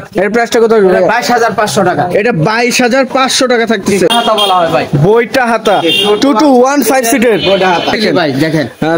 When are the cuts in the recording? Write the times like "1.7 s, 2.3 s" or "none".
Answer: 4.1 s, 8.0 s